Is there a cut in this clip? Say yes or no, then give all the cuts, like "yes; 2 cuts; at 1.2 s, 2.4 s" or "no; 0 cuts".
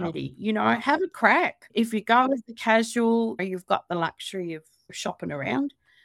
yes; 2 cuts; at 3.4 s, 4.9 s